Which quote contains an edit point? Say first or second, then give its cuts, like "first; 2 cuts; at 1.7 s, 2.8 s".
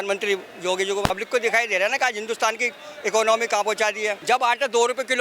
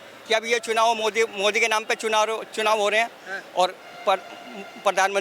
first; 2 cuts; at 1.1 s, 4.2 s